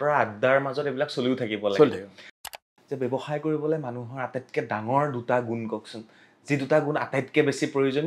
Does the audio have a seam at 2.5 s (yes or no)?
yes